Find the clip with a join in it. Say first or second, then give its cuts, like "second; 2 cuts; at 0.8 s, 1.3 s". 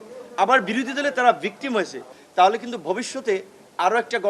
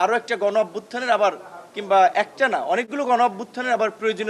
first; 1 cut; at 2.2 s